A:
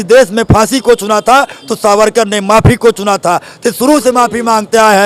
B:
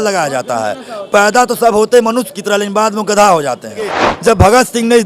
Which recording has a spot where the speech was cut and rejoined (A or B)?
B